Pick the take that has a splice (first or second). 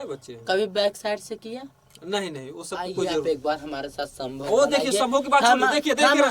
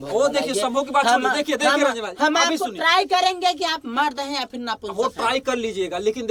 first